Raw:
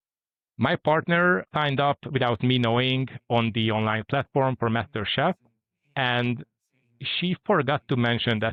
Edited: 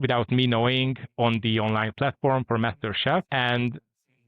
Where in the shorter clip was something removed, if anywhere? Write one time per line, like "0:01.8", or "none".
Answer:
0:03.3